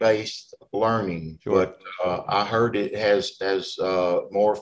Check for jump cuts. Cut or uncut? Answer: cut